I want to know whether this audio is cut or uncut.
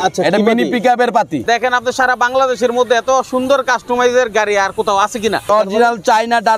cut